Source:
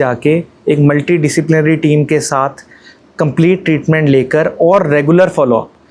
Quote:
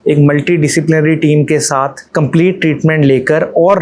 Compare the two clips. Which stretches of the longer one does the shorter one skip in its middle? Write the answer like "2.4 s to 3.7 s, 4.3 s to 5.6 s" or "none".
2.6 s to 3.0 s